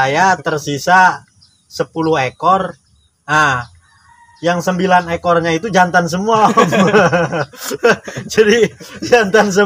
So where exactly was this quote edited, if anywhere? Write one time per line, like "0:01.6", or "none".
none